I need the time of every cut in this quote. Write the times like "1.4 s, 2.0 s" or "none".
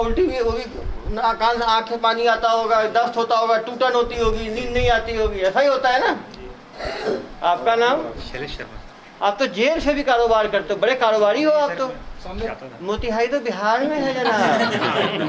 6.9 s, 12.5 s